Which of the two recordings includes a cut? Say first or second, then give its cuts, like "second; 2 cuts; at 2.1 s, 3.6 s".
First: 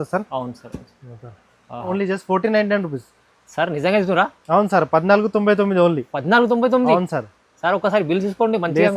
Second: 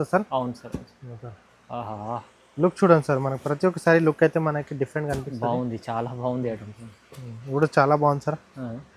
first; 1 cut; at 1.9 s